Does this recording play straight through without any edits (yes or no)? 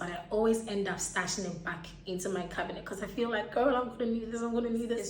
yes